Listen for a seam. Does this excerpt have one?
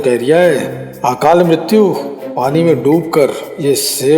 no; 0 cuts

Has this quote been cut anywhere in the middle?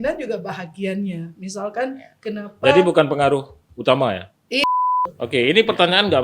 yes; 1 cut; at 4.6 s

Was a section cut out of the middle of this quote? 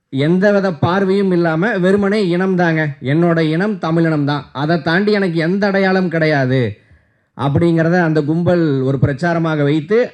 no; 0 cuts

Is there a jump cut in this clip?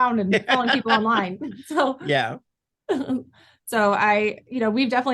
no; 0 cuts

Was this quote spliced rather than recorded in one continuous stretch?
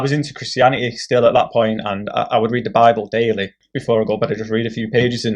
yes; 1 cut; at 3.7 s

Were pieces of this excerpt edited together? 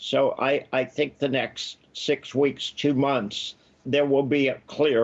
yes; 1 cut; at 3.8 s

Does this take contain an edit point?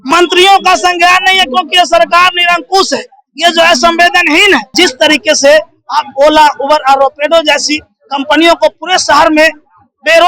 yes; 1 cut; at 4.7 s

